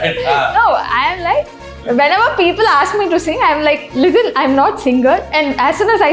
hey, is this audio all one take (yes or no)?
no